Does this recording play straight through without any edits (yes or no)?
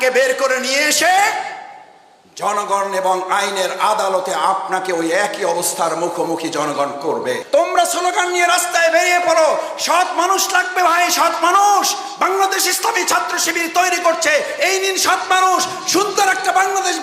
no